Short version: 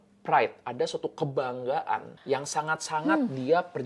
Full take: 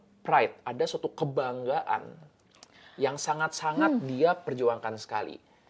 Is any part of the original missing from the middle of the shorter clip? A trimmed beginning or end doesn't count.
yes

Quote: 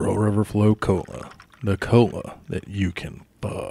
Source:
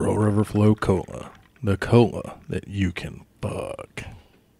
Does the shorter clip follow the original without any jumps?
yes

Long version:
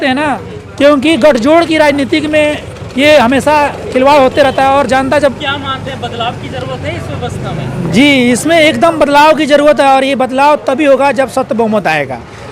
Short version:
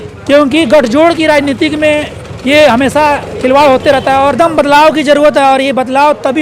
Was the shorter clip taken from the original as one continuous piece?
no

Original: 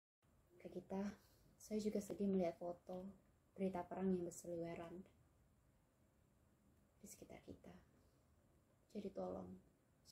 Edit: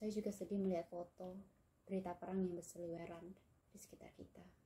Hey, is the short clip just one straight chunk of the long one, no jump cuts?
no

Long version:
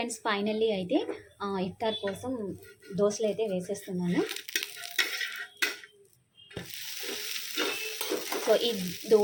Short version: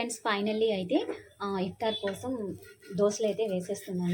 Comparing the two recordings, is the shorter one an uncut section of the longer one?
yes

